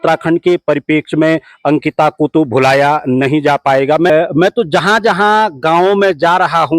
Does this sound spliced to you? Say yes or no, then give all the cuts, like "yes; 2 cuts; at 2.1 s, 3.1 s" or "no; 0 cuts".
yes; 1 cut; at 4.1 s